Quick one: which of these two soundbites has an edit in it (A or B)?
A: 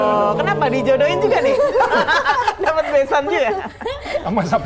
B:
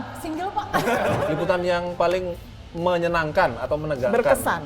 B